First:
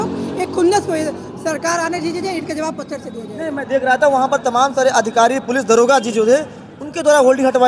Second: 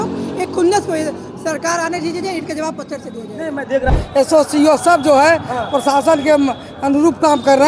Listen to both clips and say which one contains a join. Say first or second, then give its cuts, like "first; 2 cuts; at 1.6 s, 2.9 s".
second; 1 cut; at 3.9 s